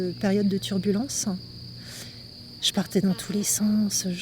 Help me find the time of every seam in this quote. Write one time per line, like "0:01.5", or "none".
none

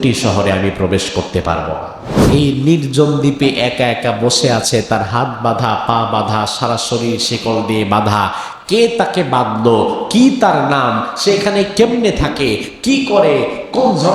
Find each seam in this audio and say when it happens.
0:02.3

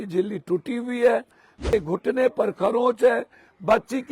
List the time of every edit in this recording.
0:01.6

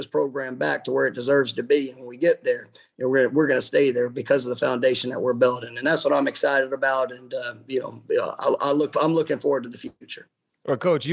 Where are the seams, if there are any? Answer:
none

